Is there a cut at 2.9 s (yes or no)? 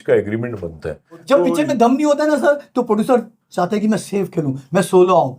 no